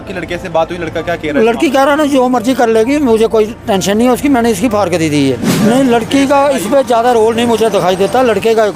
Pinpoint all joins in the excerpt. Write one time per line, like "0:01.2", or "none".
0:05.5

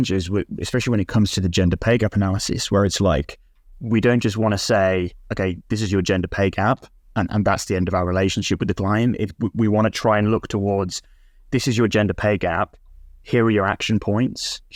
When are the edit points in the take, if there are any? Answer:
none

